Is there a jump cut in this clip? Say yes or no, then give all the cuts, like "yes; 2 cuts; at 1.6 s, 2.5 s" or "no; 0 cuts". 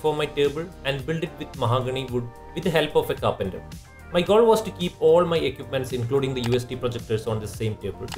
no; 0 cuts